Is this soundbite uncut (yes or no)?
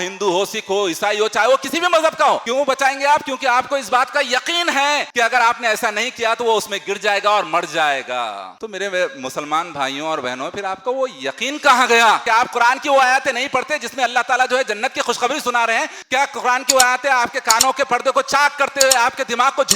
no